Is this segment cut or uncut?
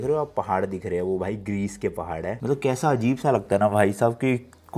uncut